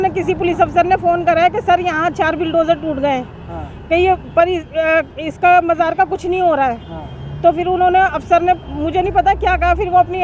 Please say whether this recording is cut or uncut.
uncut